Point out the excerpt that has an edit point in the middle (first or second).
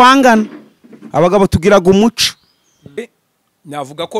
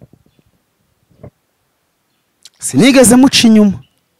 first